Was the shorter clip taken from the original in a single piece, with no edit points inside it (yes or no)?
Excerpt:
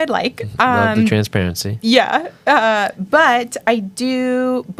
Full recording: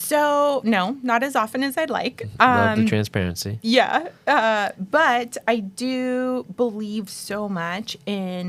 yes